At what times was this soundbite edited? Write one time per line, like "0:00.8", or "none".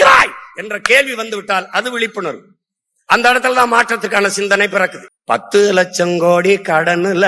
0:05.1